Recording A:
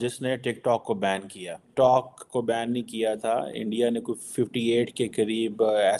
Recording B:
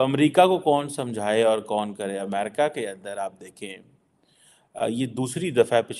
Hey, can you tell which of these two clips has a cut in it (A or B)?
A